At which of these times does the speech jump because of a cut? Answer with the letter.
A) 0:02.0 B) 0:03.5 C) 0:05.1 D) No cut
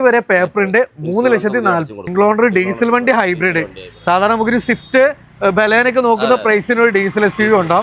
A